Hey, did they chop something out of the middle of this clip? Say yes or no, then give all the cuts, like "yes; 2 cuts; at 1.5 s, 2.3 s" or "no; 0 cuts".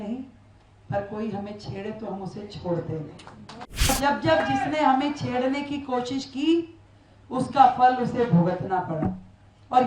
yes; 1 cut; at 3.9 s